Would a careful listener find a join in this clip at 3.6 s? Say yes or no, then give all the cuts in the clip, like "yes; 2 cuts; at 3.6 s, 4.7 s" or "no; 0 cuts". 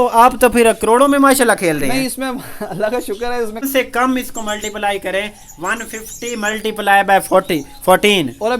yes; 1 cut; at 3.6 s